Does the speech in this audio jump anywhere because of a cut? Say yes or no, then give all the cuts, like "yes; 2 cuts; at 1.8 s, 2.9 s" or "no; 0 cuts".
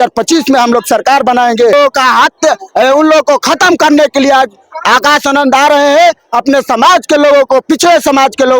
yes; 1 cut; at 1.7 s